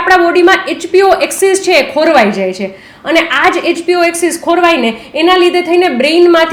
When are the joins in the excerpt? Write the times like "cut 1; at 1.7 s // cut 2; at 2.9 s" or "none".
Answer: none